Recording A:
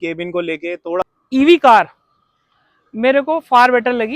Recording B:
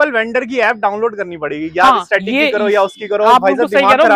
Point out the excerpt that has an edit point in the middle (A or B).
A